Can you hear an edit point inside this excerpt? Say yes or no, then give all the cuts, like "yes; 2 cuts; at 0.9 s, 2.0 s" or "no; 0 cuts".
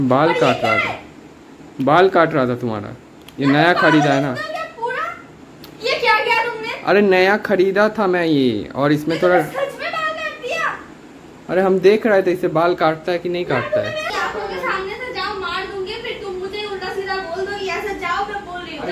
yes; 1 cut; at 14.1 s